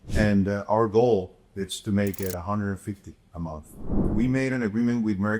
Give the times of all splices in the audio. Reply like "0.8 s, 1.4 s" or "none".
4.0 s